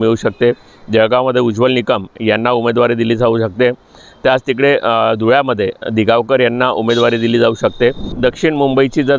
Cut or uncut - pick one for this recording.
cut